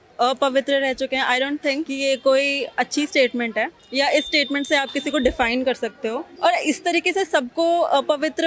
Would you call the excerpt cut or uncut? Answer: cut